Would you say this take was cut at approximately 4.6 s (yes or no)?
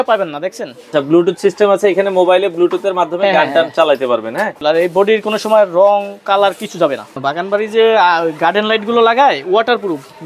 yes